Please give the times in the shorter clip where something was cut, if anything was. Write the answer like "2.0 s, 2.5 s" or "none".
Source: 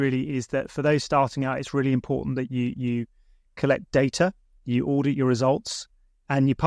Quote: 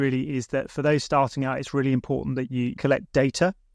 2.7 s